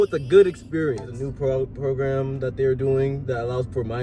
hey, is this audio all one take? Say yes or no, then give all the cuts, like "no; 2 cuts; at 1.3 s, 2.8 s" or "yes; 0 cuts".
no; 1 cut; at 1.2 s